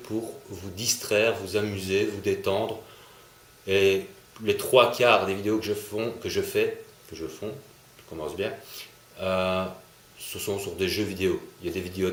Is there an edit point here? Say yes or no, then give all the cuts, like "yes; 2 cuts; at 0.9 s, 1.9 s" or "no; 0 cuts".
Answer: no; 0 cuts